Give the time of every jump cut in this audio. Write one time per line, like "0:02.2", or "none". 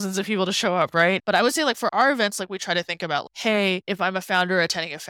0:01.2
0:03.8